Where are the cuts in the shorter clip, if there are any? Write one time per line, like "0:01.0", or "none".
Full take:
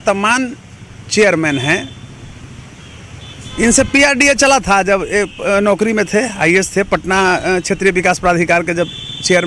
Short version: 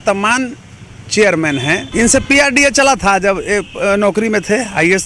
0:01.9